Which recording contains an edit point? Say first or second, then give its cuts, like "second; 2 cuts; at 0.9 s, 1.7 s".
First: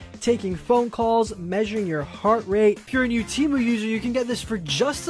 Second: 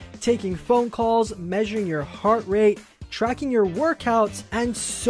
first; 1 cut; at 2.9 s